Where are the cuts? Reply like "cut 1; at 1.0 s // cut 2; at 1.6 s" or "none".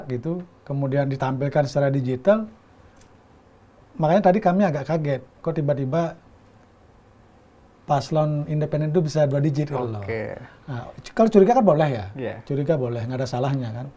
none